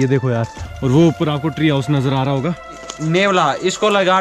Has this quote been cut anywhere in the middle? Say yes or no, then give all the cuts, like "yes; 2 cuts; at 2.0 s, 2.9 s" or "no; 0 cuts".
yes; 1 cut; at 2.9 s